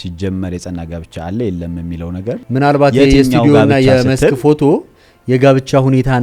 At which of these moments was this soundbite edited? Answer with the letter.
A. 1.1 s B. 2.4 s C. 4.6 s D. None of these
B